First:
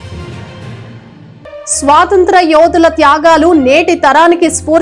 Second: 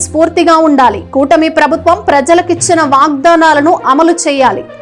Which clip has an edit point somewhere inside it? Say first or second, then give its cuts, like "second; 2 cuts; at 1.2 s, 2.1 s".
first; 1 cut; at 1.0 s